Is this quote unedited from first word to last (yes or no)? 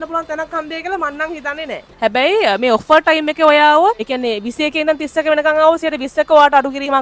no